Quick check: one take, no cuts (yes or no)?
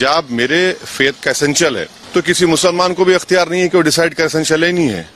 no